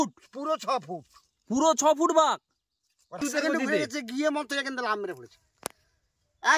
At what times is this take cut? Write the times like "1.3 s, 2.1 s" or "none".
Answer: 3.2 s